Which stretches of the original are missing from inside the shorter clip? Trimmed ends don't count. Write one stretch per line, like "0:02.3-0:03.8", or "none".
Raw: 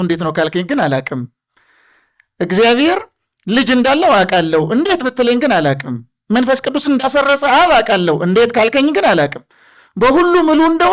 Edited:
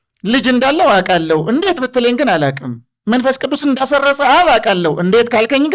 none